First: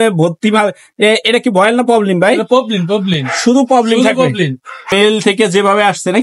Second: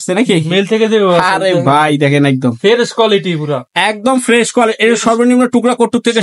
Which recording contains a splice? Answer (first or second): first